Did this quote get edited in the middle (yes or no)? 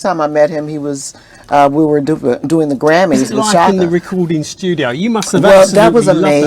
yes